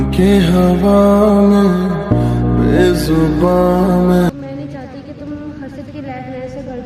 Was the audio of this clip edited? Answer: yes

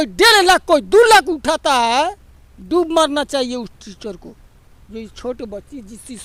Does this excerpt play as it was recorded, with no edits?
yes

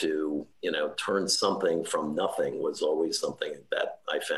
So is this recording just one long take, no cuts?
yes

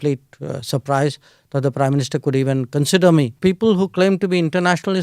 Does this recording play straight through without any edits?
no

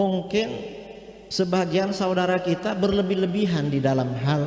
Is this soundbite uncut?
yes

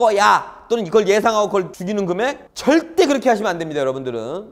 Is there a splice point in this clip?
yes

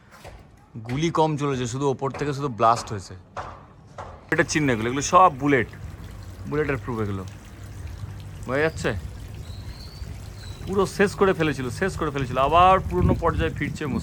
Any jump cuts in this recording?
yes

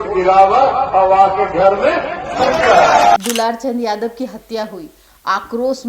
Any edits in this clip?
yes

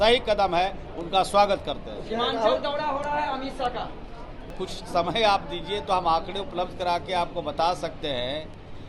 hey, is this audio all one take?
no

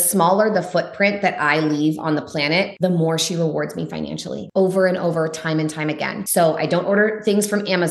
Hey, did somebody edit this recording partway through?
yes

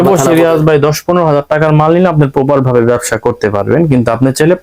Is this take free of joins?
yes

